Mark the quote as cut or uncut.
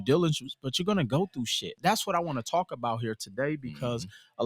cut